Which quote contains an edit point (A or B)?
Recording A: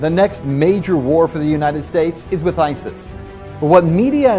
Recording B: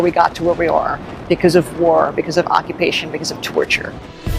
B